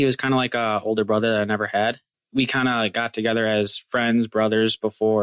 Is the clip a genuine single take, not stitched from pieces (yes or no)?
no